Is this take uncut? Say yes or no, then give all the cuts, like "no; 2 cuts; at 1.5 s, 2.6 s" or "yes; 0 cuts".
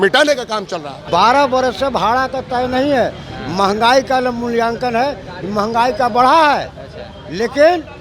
no; 1 cut; at 1.0 s